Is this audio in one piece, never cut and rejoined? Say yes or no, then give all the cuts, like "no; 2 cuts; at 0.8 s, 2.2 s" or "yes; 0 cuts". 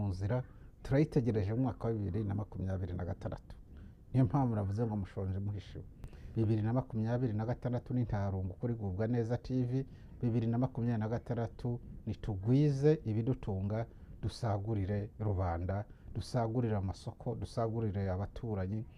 no; 1 cut; at 6.2 s